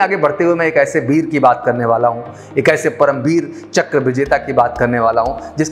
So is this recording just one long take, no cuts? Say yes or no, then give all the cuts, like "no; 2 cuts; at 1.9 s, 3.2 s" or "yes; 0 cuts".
yes; 0 cuts